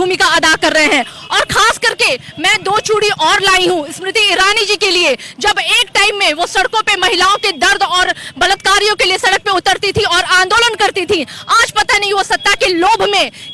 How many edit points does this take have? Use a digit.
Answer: 0